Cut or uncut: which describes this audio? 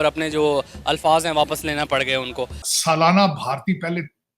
cut